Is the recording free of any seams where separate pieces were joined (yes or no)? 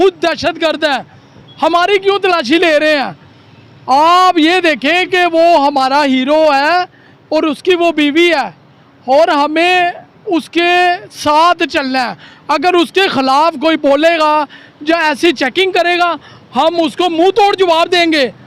yes